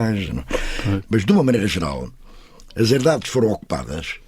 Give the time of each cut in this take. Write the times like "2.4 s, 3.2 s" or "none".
1.0 s

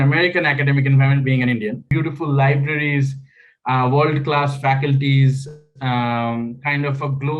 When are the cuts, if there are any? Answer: 1.8 s

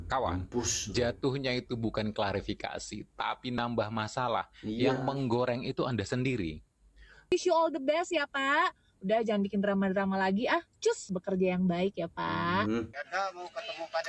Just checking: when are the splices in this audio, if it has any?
7.3 s, 13.0 s

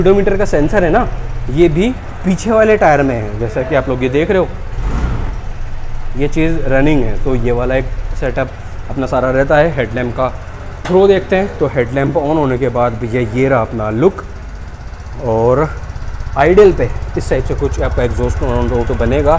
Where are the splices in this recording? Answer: none

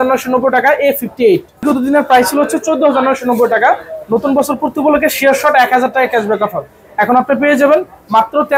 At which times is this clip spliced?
1.6 s

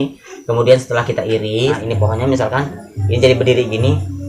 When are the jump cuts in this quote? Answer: 1.8 s

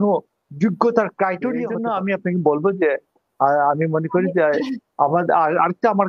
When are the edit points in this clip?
1.7 s

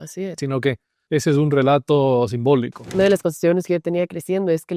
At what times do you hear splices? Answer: 0.9 s, 2.8 s

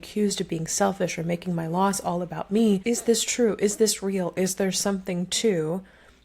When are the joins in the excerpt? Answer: 2.8 s

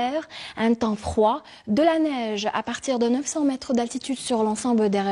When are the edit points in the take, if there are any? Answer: 1.2 s

